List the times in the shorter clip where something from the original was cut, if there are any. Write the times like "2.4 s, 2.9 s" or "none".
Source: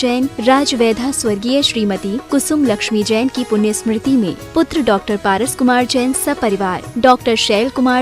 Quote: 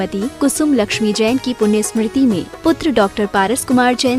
none